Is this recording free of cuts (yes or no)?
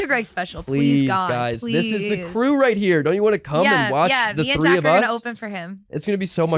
yes